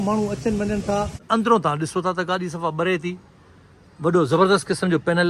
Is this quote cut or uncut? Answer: cut